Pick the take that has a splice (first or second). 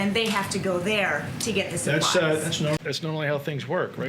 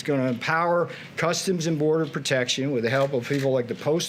first